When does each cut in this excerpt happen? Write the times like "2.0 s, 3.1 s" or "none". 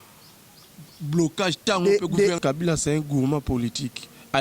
2.4 s